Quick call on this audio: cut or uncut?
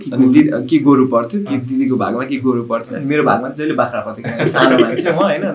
uncut